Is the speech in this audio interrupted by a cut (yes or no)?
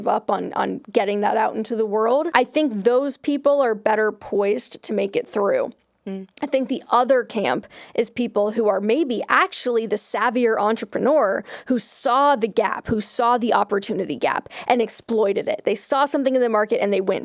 yes